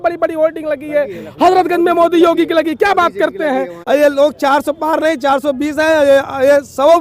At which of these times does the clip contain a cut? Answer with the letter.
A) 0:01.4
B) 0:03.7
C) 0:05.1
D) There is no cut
B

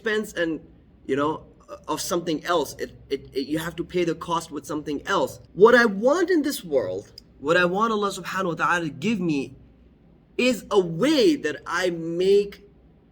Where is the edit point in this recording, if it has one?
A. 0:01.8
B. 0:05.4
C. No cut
B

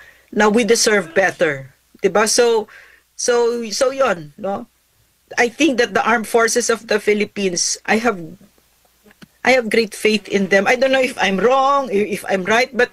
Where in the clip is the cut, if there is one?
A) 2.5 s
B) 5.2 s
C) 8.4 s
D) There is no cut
D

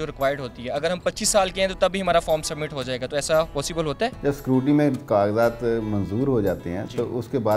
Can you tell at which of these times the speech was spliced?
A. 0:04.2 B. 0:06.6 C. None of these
A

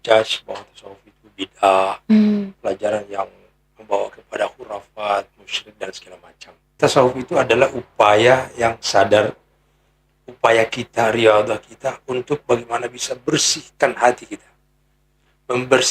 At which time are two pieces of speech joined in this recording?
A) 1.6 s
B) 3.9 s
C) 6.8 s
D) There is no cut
C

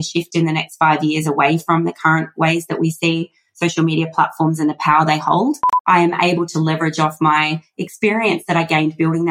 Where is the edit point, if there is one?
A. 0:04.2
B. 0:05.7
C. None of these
B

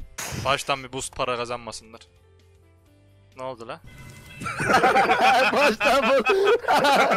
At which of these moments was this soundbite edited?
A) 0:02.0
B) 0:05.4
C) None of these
C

